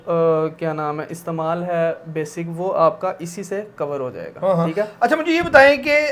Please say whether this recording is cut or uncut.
uncut